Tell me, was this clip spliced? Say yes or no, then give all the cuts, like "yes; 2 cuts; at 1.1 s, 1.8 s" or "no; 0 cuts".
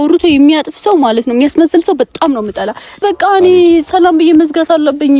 yes; 1 cut; at 3.0 s